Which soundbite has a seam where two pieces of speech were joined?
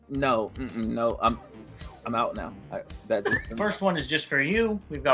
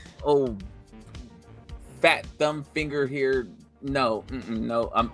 first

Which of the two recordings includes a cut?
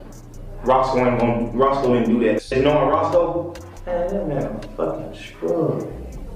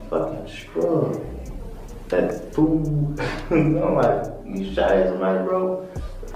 first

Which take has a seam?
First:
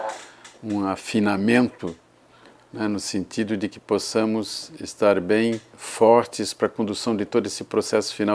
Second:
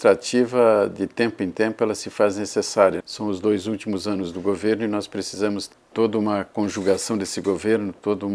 second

